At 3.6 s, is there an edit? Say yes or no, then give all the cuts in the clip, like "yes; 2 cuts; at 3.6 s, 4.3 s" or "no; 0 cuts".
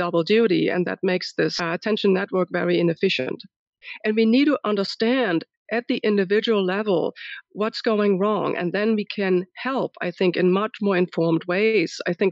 yes; 2 cuts; at 1.6 s, 3.6 s